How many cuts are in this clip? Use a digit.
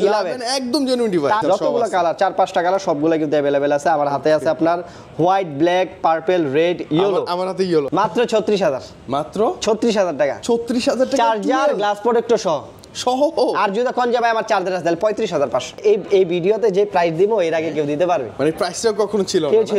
3